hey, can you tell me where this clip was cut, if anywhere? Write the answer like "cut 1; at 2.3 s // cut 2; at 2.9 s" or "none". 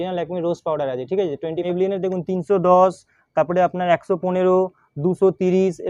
cut 1; at 1.7 s